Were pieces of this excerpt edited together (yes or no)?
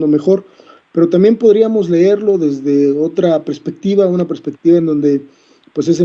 yes